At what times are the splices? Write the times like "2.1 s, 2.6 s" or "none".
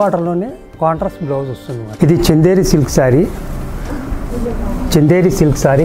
1.9 s